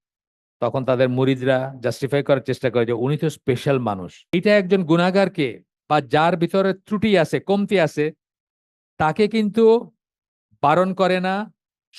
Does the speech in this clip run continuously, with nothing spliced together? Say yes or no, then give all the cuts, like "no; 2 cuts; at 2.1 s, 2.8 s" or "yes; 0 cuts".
no; 1 cut; at 4.1 s